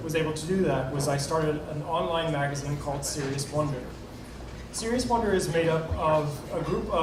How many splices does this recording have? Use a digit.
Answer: 0